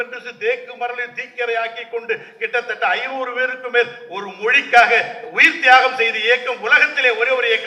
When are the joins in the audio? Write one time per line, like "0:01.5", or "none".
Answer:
none